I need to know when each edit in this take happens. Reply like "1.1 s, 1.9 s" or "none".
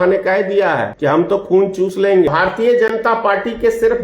0.9 s, 2.3 s